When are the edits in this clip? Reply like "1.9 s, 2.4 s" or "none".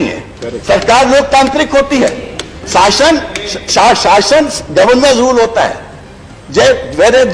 none